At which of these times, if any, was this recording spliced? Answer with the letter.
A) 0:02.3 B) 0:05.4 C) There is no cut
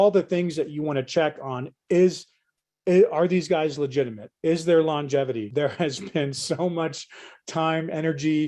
B